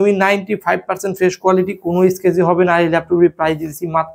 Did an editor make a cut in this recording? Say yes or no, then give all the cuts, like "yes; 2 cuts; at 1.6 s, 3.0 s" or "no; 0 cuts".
no; 0 cuts